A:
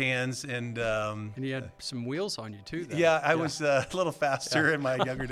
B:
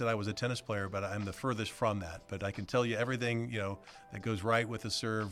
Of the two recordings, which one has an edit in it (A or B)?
A